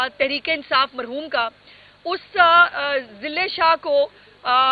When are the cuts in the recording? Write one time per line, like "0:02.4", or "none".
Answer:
none

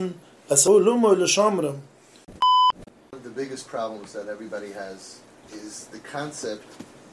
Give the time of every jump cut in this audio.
0:02.8

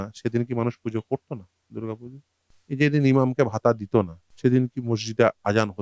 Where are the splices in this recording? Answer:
0:02.5
0:04.2

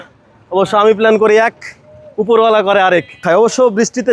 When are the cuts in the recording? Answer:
0:03.2

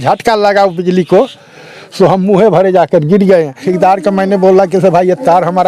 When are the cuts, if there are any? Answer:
0:03.7

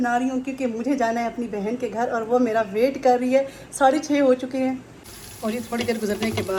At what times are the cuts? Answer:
none

